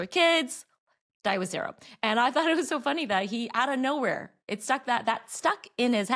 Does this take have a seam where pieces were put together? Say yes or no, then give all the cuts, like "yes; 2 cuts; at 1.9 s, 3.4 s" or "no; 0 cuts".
no; 0 cuts